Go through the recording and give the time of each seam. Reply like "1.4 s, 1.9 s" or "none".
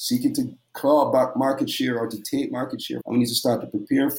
2.9 s